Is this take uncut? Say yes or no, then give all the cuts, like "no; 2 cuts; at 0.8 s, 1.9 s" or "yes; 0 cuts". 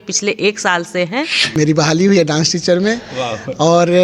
no; 1 cut; at 1.4 s